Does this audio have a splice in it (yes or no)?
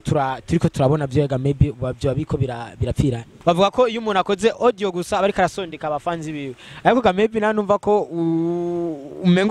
yes